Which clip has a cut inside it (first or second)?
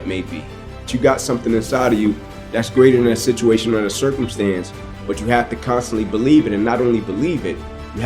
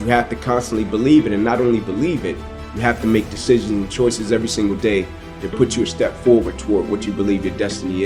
first